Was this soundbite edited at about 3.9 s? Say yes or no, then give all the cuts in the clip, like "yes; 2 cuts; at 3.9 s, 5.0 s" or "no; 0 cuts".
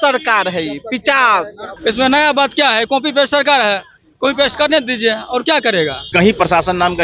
no; 2 cuts; at 1.6 s, 6.0 s